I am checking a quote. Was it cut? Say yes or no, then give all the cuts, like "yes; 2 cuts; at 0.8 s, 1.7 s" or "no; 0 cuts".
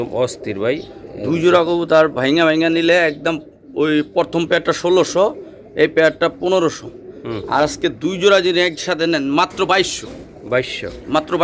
no; 0 cuts